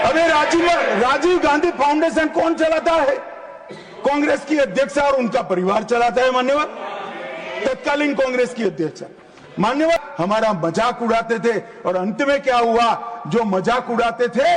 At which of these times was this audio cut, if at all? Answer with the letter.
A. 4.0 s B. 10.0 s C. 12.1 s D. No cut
B